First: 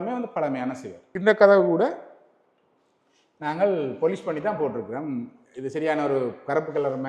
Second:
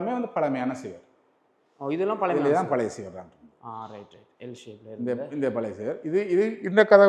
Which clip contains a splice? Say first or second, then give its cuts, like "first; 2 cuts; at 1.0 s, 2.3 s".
first; 1 cut; at 1.1 s